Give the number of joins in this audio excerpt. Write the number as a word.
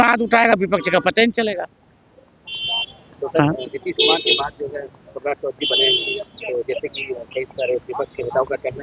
zero